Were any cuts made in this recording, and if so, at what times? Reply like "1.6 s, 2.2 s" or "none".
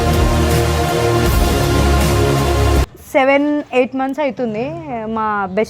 3.0 s

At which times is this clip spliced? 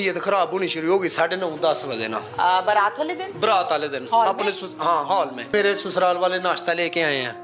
5.5 s

